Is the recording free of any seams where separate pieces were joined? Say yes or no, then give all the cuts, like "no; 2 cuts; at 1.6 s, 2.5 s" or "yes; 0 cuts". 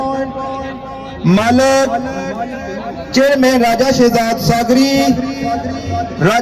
yes; 0 cuts